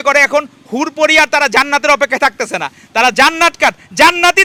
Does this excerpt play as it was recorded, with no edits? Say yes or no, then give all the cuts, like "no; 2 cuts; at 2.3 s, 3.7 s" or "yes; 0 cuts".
yes; 0 cuts